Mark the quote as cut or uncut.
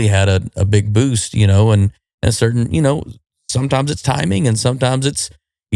uncut